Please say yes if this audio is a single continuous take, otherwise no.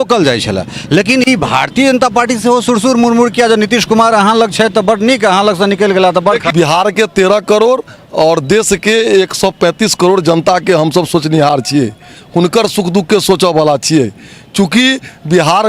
no